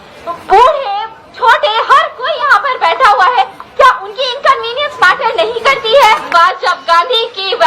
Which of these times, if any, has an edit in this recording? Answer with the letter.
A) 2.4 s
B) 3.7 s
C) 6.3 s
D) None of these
C